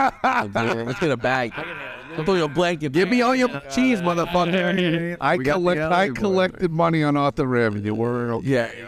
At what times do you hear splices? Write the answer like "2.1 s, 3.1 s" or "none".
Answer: 5.1 s